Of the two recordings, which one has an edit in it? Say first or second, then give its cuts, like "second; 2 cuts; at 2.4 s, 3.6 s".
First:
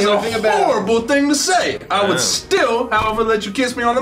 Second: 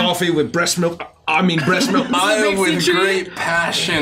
second; 1 cut; at 2.1 s